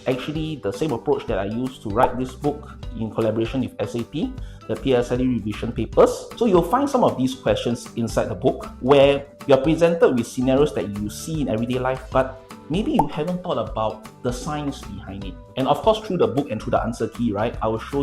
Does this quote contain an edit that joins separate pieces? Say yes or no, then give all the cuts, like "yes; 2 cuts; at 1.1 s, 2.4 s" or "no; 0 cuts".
yes; 1 cut; at 6.3 s